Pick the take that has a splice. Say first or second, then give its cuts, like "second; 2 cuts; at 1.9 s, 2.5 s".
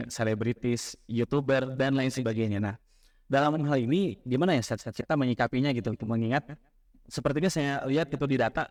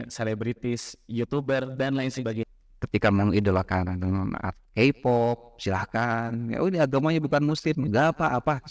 second; 1 cut; at 2.5 s